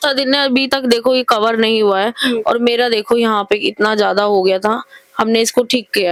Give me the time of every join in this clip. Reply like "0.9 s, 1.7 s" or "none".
none